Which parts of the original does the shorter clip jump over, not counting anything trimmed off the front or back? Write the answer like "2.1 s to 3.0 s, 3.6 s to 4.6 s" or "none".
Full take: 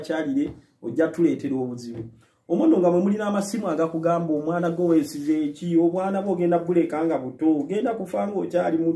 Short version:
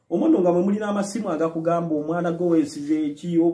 none